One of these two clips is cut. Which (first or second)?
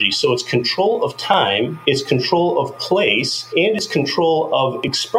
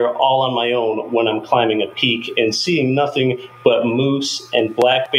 first